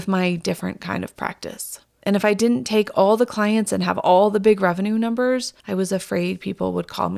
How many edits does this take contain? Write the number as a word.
one